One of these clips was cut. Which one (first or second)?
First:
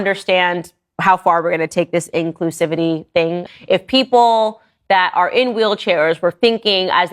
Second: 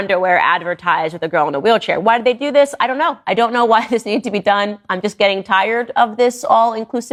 first